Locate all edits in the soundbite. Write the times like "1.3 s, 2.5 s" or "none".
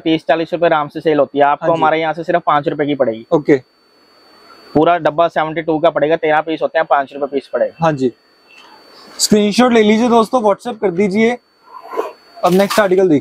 none